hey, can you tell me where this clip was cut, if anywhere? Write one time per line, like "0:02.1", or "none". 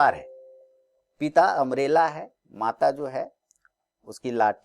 none